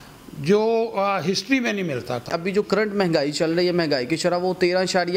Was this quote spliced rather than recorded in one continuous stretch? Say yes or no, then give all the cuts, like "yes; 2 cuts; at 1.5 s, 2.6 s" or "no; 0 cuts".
yes; 1 cut; at 2.3 s